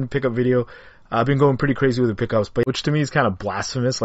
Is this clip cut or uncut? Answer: cut